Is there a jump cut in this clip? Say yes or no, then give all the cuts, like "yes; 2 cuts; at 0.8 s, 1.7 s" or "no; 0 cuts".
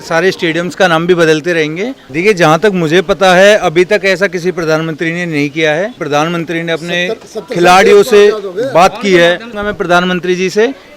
yes; 3 cuts; at 2.0 s, 6.0 s, 9.5 s